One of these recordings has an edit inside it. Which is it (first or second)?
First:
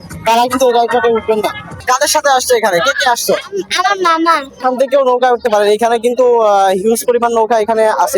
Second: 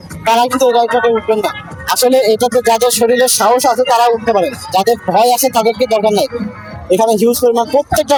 first